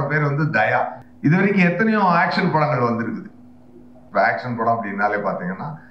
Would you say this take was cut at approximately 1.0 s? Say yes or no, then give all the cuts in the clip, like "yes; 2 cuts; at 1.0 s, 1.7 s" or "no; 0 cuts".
yes; 1 cut; at 1.0 s